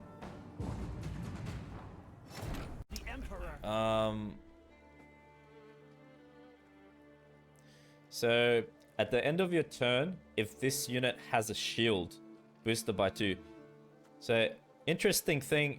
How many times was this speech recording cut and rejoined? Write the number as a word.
one